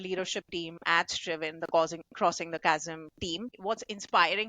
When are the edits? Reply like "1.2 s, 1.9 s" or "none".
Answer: 3.6 s